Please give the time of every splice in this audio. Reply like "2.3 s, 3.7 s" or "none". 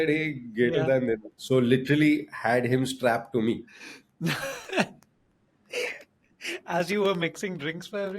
1.3 s